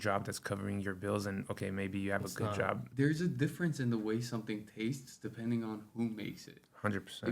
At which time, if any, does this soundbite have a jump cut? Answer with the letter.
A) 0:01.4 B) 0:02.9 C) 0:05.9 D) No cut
B